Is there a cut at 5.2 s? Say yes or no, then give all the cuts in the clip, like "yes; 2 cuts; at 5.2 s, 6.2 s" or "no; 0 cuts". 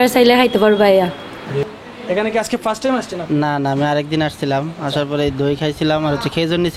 no; 1 cut; at 1.7 s